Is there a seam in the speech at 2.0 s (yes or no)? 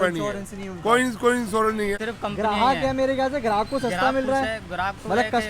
yes